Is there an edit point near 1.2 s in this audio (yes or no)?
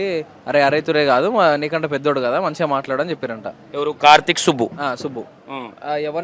no